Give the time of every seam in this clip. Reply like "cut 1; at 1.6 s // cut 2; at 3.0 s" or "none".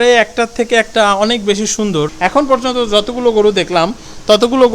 cut 1; at 2.1 s